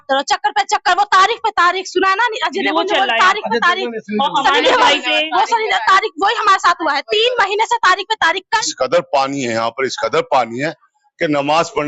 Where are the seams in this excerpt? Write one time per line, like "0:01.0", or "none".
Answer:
0:08.4

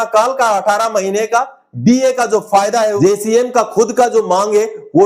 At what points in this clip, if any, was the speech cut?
0:03.0

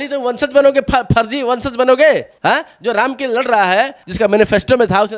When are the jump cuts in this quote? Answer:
0:02.3
0:04.0

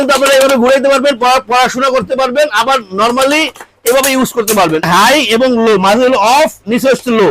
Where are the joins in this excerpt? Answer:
0:04.8

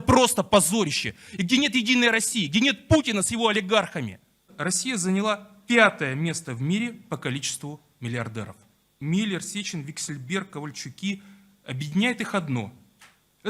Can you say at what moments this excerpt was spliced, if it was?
0:04.5
0:08.9

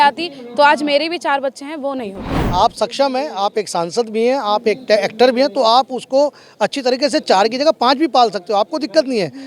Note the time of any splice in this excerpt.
0:02.3

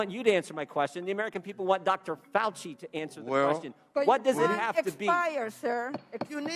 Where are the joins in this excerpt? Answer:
none

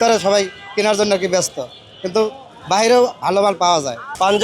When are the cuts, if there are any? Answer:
none

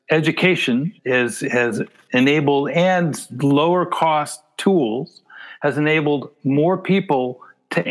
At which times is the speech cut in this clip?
0:00.9

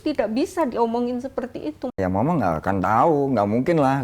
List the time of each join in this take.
0:01.9

